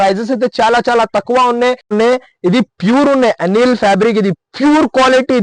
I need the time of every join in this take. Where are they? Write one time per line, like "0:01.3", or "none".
0:01.9